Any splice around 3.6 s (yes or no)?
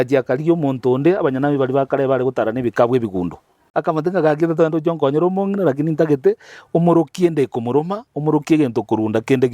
yes